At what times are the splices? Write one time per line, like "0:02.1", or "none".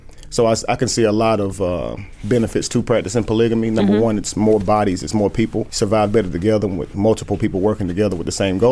0:05.7